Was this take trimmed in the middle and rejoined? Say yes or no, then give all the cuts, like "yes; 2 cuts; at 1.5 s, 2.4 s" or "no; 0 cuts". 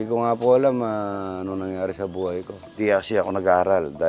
yes; 1 cut; at 2.8 s